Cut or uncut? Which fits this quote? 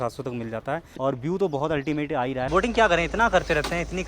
cut